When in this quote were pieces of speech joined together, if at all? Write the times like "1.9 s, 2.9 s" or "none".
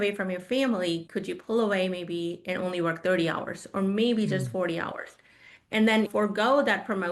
6.1 s